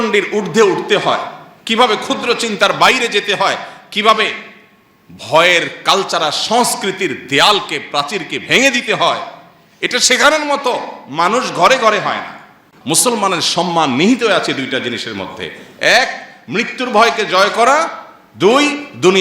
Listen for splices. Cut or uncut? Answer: cut